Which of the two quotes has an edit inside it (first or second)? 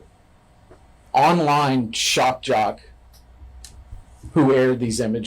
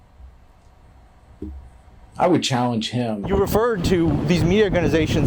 second